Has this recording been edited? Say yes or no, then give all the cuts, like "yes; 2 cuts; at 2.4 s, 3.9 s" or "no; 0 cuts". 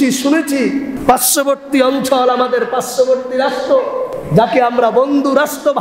yes; 2 cuts; at 0.9 s, 4.1 s